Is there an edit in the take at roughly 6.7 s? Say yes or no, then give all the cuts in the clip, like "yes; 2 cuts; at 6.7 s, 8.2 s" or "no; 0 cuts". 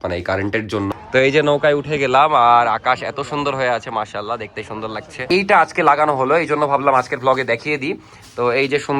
no; 2 cuts; at 0.9 s, 5.2 s